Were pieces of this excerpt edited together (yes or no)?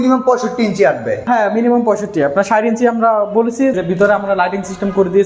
yes